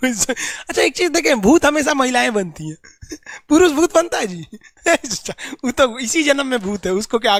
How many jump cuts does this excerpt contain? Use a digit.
0